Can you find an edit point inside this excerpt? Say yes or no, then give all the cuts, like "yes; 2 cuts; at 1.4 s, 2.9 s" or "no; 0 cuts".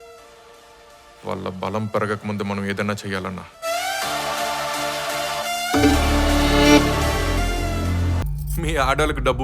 yes; 1 cut; at 8.2 s